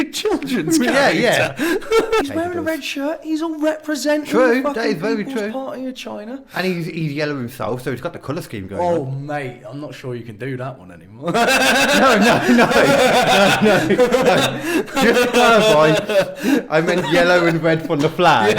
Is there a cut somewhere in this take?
yes; 2 cuts; at 2.3 s, 14.3 s

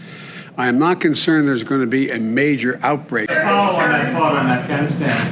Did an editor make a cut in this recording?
yes; 1 cut; at 3.3 s

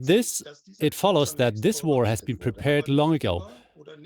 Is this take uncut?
yes; 0 cuts

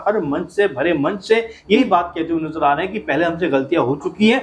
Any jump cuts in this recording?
no; 0 cuts

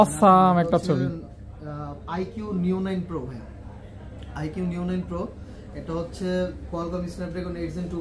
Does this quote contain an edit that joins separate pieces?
no; 0 cuts

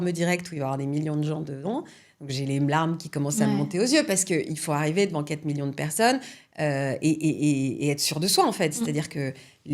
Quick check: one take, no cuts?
yes; 0 cuts

